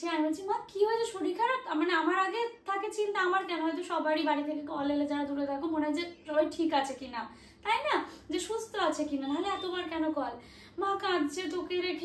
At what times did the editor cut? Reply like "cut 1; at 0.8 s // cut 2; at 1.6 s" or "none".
none